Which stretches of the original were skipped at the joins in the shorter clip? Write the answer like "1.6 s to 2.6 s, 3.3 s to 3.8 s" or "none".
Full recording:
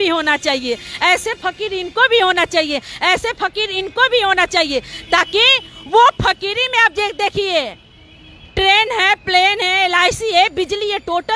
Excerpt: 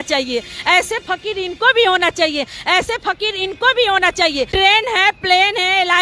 4.8 s to 8.5 s